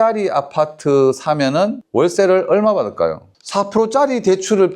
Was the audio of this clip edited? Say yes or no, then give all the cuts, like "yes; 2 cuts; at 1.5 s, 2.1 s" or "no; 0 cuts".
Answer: yes; 1 cut; at 3.3 s